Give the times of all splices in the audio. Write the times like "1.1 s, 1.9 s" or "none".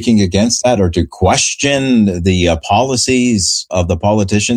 3.7 s